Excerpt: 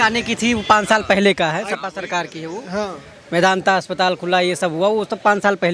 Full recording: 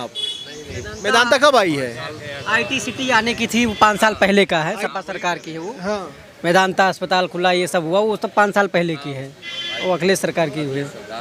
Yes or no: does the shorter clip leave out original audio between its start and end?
no